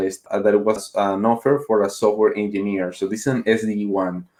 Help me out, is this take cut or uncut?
uncut